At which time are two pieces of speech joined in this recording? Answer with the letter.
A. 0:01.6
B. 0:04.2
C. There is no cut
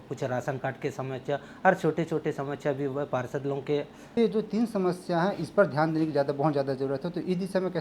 B